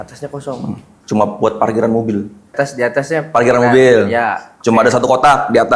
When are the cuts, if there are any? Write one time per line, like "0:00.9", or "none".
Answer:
0:02.5